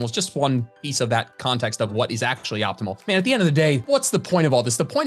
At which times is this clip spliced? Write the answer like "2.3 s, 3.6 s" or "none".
3.0 s, 3.8 s